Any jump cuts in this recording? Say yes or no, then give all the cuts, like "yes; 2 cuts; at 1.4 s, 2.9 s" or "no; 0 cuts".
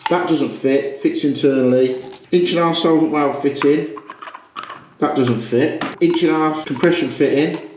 yes; 2 cuts; at 5.9 s, 6.7 s